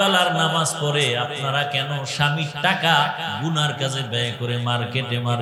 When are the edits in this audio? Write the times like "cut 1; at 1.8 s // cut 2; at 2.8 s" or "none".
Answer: none